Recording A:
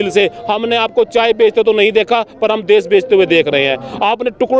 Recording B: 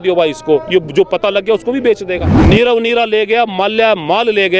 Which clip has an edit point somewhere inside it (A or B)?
B